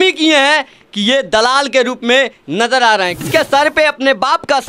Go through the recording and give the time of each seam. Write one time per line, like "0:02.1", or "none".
0:03.3